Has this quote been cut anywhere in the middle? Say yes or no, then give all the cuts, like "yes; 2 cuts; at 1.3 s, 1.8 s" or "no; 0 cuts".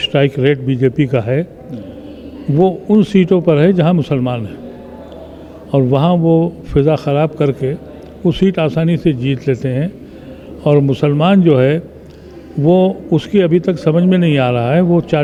no; 0 cuts